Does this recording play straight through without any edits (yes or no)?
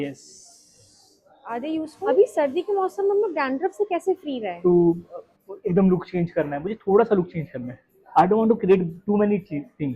no